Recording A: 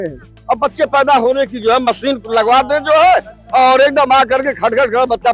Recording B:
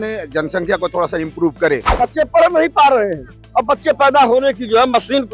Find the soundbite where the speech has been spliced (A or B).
B